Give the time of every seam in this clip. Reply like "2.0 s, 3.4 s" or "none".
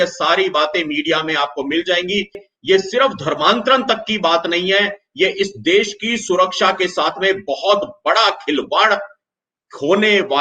2.5 s